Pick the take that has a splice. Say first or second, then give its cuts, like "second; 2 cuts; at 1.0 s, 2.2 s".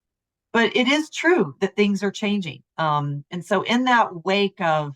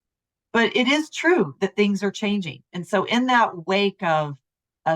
second; 1 cut; at 2.6 s